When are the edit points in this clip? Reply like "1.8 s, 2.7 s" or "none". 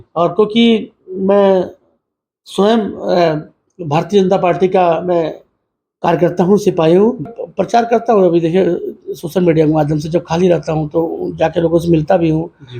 7.4 s